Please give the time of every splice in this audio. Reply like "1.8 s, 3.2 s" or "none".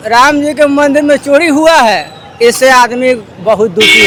none